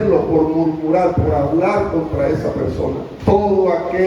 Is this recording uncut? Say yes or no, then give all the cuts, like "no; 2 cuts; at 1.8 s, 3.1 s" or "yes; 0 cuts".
no; 1 cut; at 3.1 s